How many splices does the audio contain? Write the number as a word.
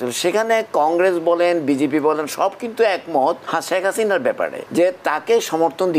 two